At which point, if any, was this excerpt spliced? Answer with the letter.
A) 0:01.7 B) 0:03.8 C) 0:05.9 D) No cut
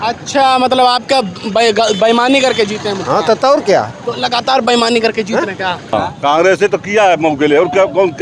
C